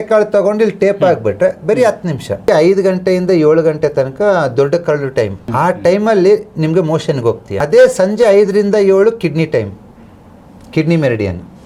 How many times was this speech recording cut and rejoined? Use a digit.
3